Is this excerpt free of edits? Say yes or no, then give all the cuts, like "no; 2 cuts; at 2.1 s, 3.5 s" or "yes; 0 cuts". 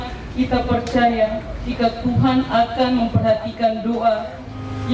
yes; 0 cuts